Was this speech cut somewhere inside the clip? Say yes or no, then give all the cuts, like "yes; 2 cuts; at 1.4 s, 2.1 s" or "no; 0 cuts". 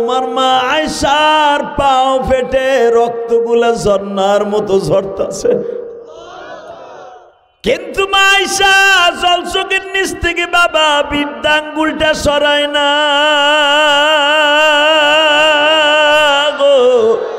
no; 0 cuts